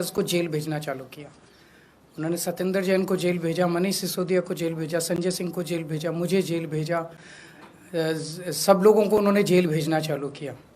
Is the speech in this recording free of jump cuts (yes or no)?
yes